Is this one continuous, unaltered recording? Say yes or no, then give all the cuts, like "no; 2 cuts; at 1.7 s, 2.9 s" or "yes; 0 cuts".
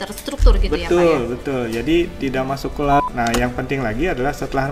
no; 1 cut; at 3.0 s